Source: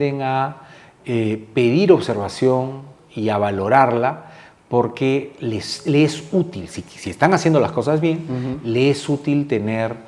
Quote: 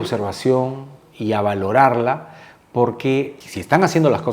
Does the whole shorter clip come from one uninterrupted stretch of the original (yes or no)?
no